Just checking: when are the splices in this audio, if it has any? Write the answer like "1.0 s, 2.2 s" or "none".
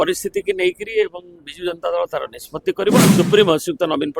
3.1 s